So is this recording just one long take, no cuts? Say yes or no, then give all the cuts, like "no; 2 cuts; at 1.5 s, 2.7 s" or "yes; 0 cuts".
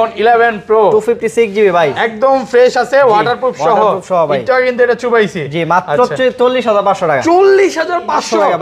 yes; 0 cuts